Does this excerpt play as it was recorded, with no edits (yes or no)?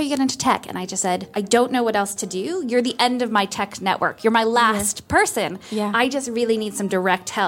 no